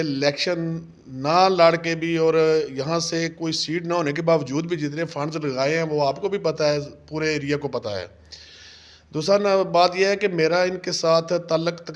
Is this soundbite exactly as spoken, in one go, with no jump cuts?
yes; 0 cuts

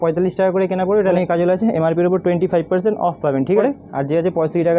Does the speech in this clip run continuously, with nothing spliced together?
no; 2 cuts; at 1.1 s, 3.6 s

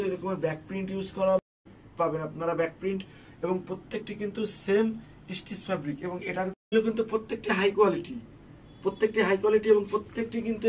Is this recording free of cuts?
no; 2 cuts; at 1.4 s, 6.7 s

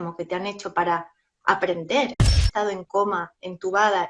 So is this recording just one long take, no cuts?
no; 1 cut; at 2.3 s

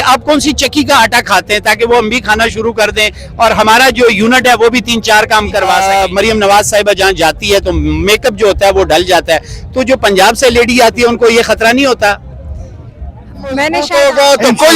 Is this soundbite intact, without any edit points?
no; 2 cuts; at 5.8 s, 13.8 s

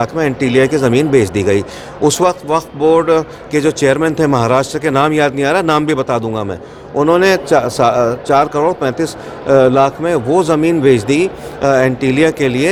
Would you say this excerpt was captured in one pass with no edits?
yes; 0 cuts

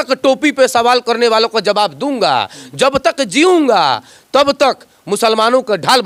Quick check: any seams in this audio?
no; 0 cuts

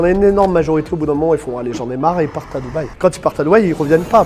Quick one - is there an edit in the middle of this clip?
no; 0 cuts

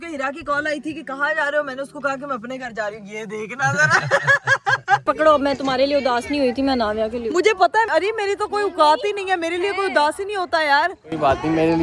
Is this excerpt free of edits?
no; 2 cuts; at 5.0 s, 7.9 s

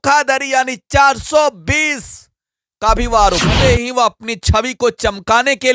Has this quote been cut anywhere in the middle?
yes; 1 cut; at 3.6 s

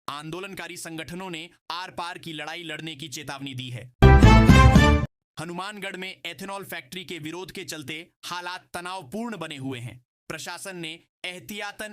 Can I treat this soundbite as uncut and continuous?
no; 2 cuts; at 3.9 s, 5.2 s

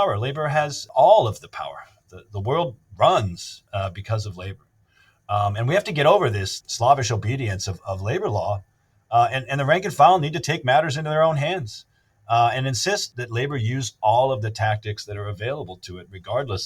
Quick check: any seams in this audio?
no; 0 cuts

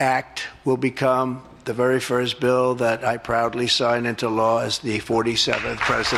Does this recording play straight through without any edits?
yes; 0 cuts

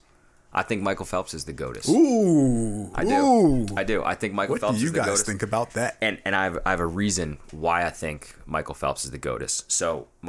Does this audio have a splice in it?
no; 0 cuts

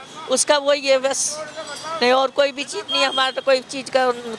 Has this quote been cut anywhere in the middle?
no; 0 cuts

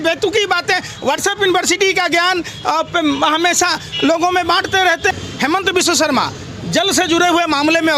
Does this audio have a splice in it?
yes; 1 cut; at 5.2 s

